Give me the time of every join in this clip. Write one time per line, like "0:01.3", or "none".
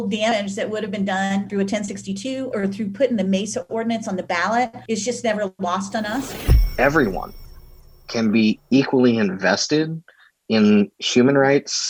0:06.4